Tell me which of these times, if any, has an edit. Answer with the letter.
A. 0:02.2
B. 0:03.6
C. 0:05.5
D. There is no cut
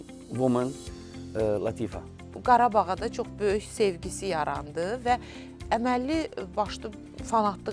A